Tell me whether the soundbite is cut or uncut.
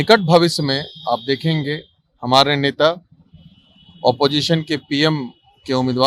uncut